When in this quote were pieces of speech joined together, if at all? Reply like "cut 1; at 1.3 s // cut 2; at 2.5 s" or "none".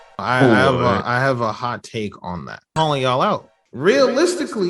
cut 1; at 2.7 s